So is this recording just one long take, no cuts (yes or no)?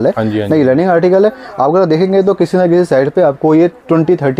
yes